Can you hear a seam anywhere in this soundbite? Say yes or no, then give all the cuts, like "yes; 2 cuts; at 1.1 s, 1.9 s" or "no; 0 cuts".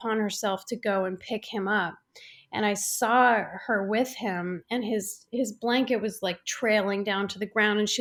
no; 0 cuts